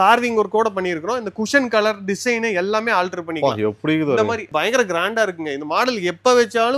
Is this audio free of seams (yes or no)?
yes